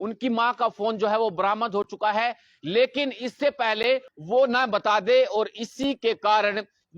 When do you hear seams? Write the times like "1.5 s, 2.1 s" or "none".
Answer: 4.1 s